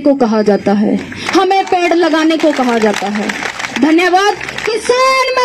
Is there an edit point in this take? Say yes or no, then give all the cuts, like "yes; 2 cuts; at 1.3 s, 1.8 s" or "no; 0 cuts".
no; 0 cuts